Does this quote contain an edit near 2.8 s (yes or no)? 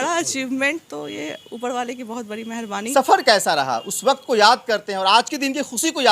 yes